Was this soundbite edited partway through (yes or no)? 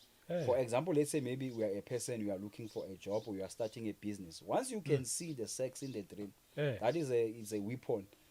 no